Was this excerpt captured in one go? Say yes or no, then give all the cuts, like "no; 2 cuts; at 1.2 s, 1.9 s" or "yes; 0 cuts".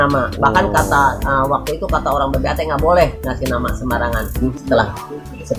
no; 1 cut; at 4.5 s